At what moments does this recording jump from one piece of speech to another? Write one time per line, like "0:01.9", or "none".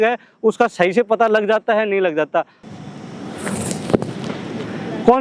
0:02.6